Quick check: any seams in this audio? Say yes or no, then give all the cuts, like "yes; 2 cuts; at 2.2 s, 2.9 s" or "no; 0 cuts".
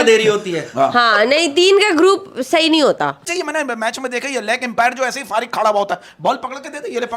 yes; 1 cut; at 3.3 s